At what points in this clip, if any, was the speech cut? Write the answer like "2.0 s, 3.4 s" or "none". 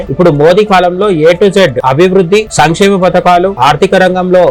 none